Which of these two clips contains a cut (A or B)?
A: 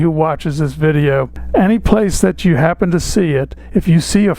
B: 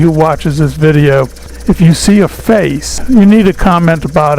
B